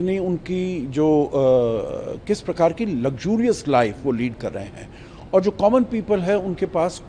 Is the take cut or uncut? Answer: uncut